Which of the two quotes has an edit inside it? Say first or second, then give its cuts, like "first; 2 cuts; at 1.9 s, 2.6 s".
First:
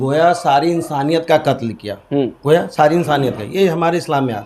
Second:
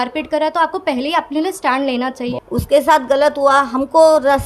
second; 1 cut; at 2.3 s